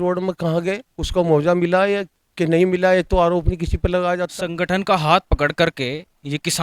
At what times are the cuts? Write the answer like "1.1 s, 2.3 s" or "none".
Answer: 4.4 s